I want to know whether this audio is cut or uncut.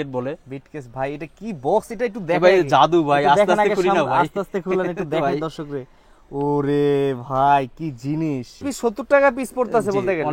cut